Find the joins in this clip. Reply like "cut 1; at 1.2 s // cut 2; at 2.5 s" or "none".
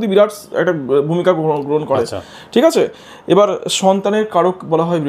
none